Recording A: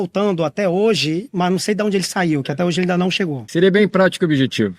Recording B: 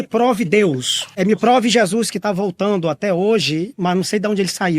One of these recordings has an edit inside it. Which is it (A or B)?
A